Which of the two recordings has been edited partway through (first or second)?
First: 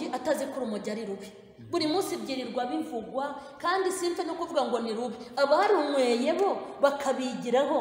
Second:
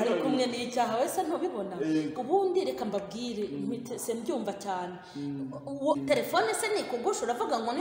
second